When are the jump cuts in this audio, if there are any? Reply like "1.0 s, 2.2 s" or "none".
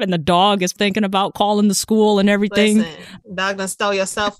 none